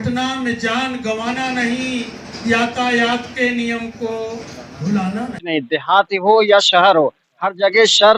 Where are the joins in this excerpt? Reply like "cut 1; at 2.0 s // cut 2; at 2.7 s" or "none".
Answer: cut 1; at 5.4 s